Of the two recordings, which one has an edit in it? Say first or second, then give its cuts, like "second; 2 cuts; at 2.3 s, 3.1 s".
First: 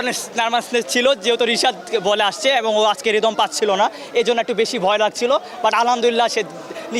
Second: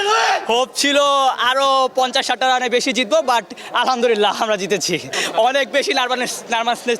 second; 1 cut; at 5.2 s